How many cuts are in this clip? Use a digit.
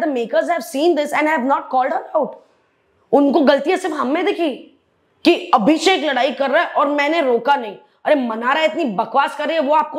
0